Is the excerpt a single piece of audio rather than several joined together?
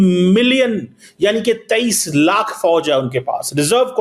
yes; 0 cuts

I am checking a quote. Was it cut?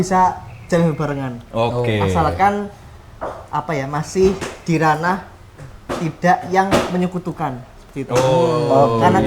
no; 0 cuts

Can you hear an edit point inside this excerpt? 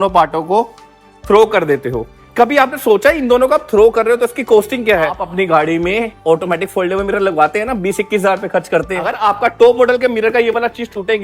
yes; 2 cuts; at 5.2 s, 9.2 s

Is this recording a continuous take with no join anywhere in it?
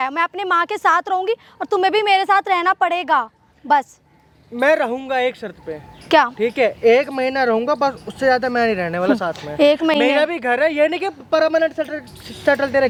yes; 0 cuts

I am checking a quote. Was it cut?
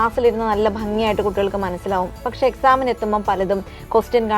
no; 0 cuts

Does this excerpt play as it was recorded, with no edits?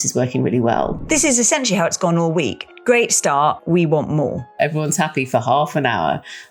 no; 4 cuts; at 1.0 s, 2.7 s, 3.6 s, 4.6 s

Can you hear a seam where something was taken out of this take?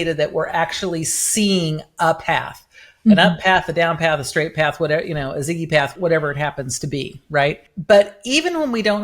yes; 1 cut; at 5.9 s

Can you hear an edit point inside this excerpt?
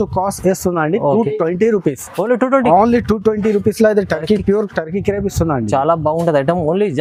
no; 0 cuts

